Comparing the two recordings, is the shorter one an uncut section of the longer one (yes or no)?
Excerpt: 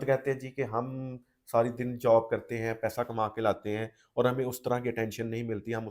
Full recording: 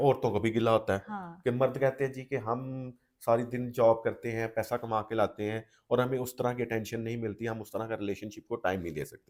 yes